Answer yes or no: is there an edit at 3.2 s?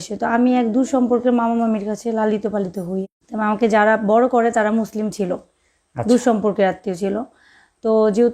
yes